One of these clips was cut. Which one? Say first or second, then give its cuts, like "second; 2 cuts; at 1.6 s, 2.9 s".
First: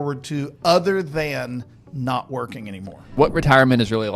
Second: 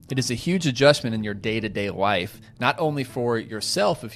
first; 1 cut; at 3.1 s